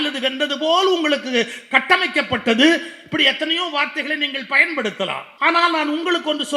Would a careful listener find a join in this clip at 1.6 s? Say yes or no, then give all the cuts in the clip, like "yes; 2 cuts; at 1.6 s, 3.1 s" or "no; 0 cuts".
no; 1 cut; at 5.3 s